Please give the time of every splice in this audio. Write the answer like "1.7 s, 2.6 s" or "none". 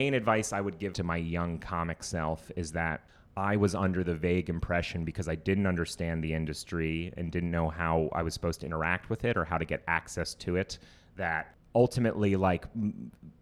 0.9 s, 3.2 s, 11.6 s